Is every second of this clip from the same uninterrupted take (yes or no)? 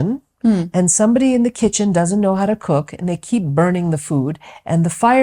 yes